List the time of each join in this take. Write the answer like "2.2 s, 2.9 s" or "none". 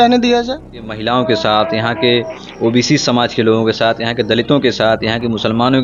0.9 s